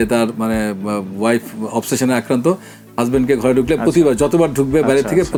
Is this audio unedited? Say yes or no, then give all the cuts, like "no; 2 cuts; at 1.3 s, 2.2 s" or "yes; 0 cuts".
yes; 0 cuts